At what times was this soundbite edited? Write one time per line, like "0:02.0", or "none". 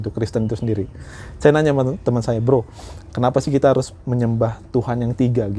none